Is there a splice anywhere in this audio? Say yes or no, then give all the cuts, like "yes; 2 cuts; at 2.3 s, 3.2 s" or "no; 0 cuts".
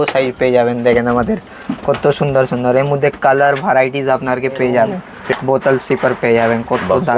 yes; 1 cut; at 5.1 s